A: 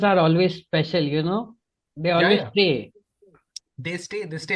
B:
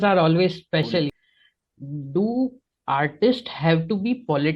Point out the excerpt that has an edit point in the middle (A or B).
B